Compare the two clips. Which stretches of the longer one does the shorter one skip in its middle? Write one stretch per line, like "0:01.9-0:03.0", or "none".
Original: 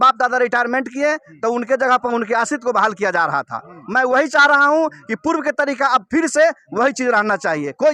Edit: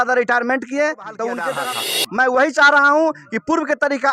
0:01.8-0:03.3